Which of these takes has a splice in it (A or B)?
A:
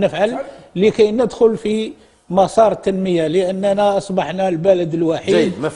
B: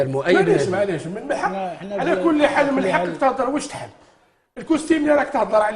B